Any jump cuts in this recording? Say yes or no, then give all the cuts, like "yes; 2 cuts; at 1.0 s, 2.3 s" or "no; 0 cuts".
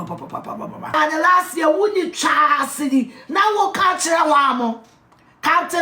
yes; 1 cut; at 0.9 s